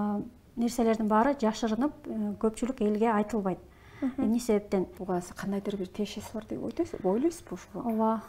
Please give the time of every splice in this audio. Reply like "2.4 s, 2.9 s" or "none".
5.0 s